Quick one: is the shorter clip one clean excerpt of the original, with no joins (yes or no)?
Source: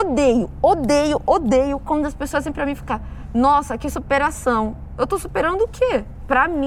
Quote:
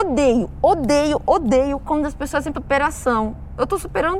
no